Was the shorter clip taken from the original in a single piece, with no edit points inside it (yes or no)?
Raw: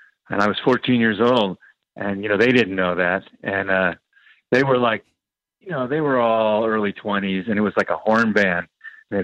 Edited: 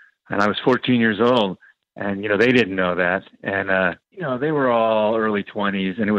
no